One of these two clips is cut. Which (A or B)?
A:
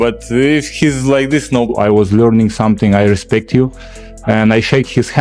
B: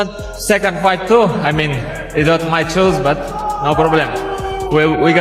A